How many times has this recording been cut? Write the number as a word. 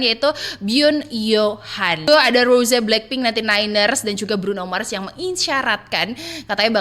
one